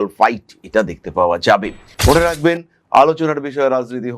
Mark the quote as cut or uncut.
cut